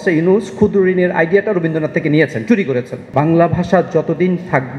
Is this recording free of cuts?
no; 1 cut; at 3.0 s

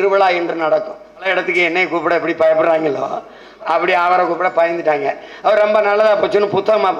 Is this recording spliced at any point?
yes; 1 cut; at 1.3 s

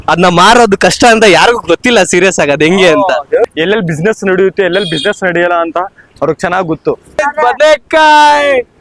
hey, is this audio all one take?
no; 2 cuts; at 3.5 s, 7.2 s

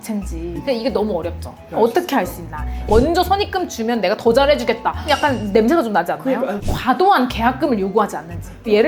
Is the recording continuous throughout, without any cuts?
no; 2 cuts; at 2.8 s, 6.5 s

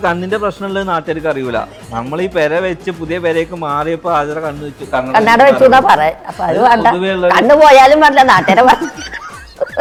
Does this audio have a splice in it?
no; 0 cuts

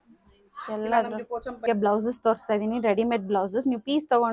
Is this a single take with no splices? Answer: no; 1 cut; at 1.5 s

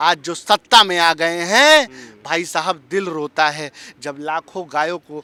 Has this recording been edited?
no; 0 cuts

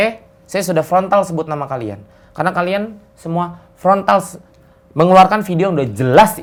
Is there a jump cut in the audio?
no; 0 cuts

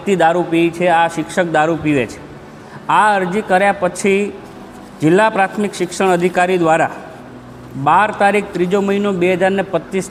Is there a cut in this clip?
no; 0 cuts

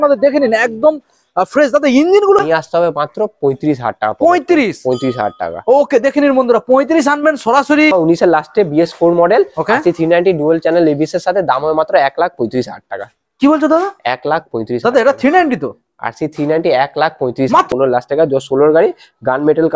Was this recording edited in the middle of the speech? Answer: yes; 3 cuts; at 2.4 s, 7.9 s, 17.7 s

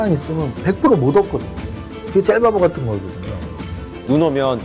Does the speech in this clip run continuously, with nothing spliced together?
yes; 0 cuts

